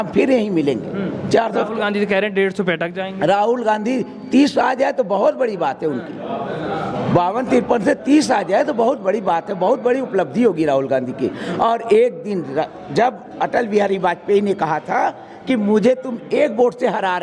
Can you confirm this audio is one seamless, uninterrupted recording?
yes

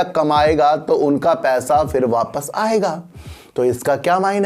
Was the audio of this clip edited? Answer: no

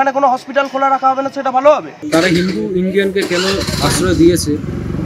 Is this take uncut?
no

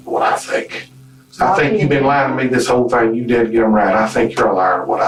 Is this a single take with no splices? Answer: yes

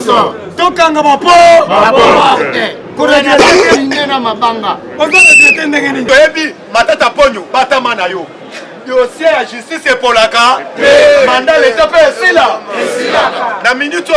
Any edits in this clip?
yes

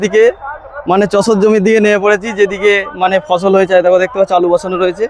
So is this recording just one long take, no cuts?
yes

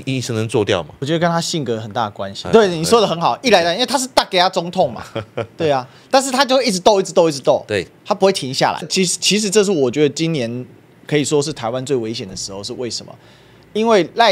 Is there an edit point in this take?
no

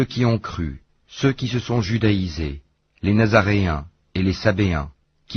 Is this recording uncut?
no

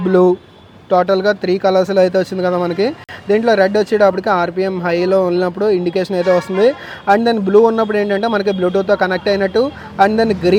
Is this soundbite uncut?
yes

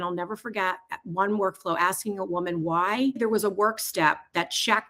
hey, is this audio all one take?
no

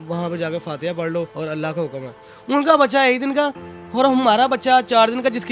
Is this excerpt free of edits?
no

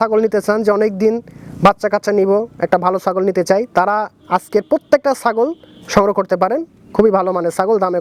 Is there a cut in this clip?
no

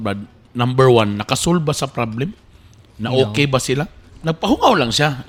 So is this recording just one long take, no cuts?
yes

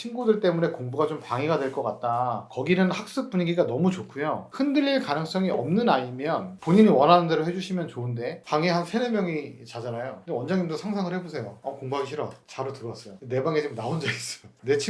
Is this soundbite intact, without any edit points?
no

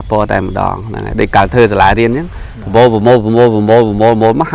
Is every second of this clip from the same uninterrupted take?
yes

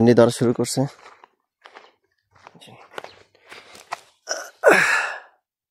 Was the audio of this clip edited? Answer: no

